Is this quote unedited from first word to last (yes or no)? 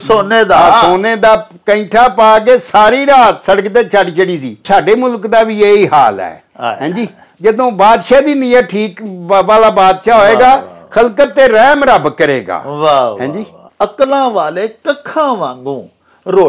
no